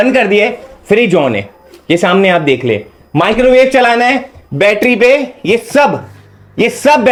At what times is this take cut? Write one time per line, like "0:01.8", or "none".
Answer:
none